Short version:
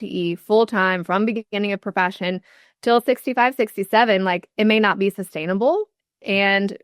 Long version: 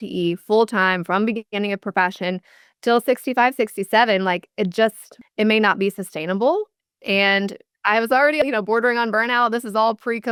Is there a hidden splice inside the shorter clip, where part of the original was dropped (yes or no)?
yes